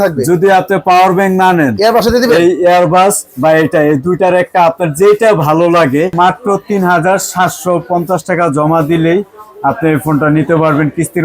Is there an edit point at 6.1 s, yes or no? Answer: yes